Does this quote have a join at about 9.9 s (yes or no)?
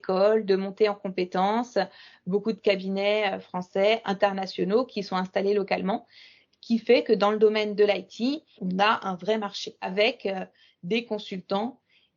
yes